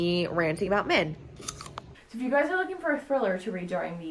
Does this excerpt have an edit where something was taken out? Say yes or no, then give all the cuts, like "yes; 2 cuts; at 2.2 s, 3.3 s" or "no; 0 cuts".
yes; 1 cut; at 1.8 s